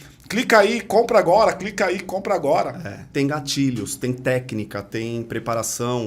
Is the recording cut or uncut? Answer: cut